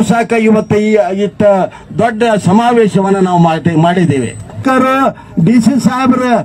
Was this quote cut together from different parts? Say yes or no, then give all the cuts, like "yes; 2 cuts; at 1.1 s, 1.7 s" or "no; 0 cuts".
yes; 1 cut; at 4.6 s